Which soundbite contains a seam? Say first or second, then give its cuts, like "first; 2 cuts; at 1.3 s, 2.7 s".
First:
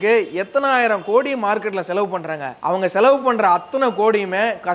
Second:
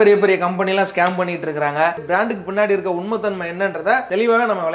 second; 1 cut; at 2.0 s